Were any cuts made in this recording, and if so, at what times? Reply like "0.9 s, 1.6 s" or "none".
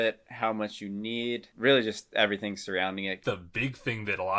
1.5 s, 3.2 s